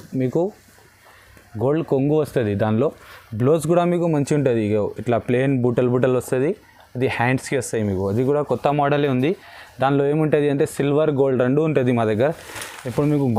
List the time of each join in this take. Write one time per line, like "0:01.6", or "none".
none